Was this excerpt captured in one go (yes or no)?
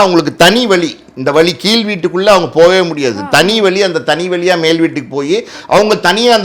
yes